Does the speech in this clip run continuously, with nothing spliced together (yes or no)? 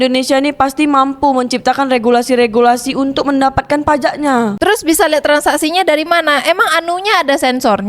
no